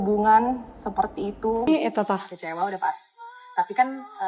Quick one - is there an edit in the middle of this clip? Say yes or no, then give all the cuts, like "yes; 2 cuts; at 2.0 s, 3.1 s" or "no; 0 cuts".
yes; 1 cut; at 1.7 s